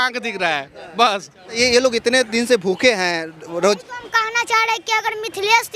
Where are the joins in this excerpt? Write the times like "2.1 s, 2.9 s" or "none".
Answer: 1.6 s